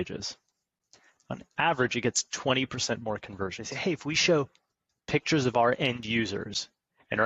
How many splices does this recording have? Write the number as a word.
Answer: one